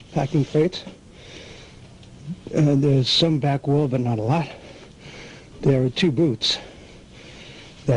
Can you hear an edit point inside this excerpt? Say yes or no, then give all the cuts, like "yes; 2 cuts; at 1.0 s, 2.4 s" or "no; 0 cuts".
no; 0 cuts